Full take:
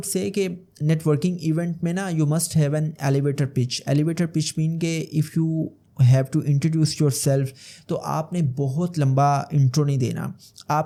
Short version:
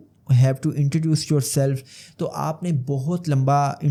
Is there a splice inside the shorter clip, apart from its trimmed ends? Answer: no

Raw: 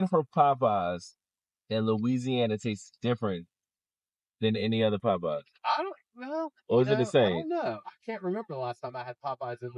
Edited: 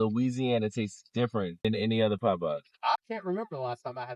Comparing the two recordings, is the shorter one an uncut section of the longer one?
no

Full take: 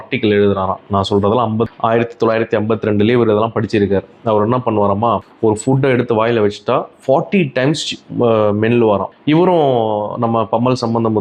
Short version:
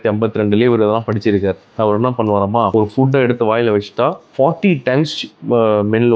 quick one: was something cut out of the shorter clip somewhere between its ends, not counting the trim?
yes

